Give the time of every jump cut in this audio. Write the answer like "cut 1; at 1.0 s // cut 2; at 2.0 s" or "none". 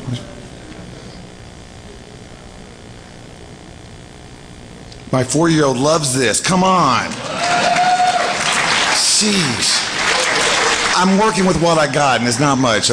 cut 1; at 9.5 s